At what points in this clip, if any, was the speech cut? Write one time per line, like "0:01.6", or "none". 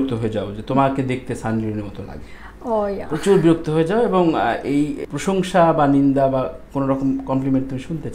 0:05.1